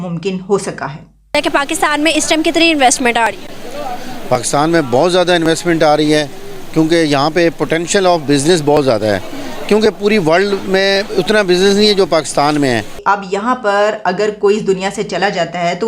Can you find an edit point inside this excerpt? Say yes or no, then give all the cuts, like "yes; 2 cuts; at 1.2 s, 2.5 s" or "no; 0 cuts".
yes; 2 cuts; at 1.3 s, 13.0 s